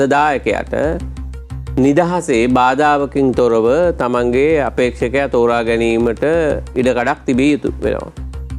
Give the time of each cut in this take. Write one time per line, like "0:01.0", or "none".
none